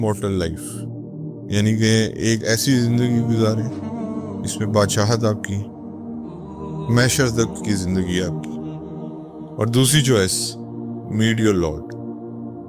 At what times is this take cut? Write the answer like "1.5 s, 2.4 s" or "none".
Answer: 11.7 s